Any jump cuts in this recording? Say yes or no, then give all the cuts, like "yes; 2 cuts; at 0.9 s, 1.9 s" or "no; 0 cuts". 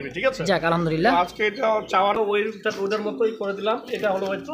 yes; 1 cut; at 2.2 s